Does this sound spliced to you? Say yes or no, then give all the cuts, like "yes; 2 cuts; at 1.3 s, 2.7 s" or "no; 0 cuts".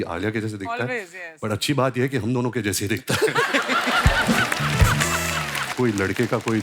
yes; 1 cut; at 5.7 s